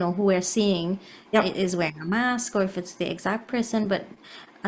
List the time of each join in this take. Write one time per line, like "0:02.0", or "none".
none